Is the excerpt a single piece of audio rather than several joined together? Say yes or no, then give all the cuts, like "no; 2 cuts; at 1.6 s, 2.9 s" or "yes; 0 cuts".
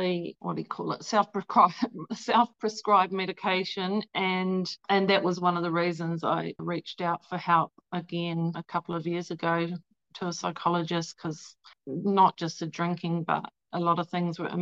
no; 3 cuts; at 6.6 s, 11.7 s, 13.6 s